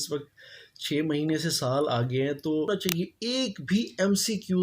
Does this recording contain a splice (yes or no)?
yes